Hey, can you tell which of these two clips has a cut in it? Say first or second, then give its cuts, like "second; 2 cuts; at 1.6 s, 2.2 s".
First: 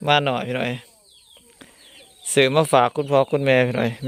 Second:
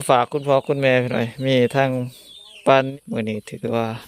second; 1 cut; at 2.9 s